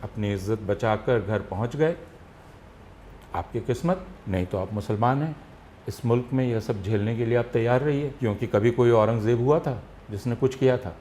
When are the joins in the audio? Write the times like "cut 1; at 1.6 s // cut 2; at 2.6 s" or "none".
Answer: cut 1; at 4.1 s // cut 2; at 8.1 s